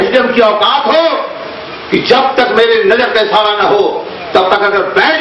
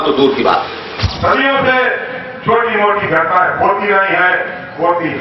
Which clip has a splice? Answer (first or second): second